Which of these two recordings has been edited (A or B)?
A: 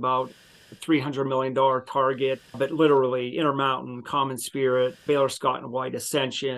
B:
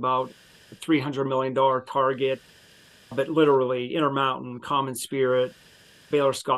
A